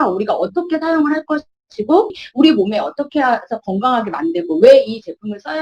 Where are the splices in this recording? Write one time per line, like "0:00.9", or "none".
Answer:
0:02.2